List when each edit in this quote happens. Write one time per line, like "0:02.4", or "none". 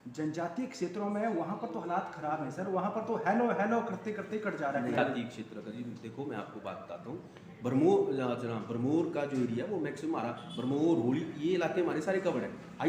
0:05.0